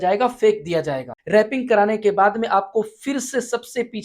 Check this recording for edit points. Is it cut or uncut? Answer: cut